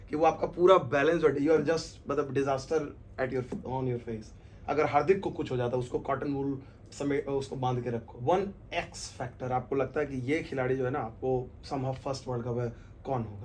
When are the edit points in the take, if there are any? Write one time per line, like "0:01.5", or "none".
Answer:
0:08.1